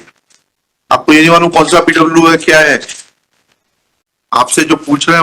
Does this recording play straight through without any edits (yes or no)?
no